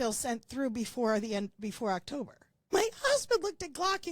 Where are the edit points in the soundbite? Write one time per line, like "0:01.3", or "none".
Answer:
0:02.7